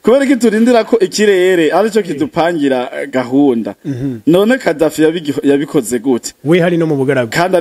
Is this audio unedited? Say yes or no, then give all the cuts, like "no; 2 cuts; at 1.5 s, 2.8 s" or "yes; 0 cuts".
yes; 0 cuts